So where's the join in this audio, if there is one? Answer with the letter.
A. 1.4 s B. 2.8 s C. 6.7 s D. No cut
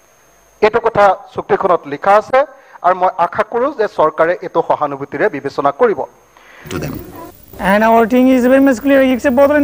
C